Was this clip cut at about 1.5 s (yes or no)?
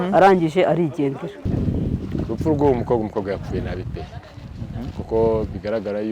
yes